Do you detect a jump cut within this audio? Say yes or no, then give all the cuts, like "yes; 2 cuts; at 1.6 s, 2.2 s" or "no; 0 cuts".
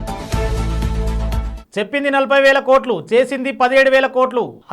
yes; 1 cut; at 1.5 s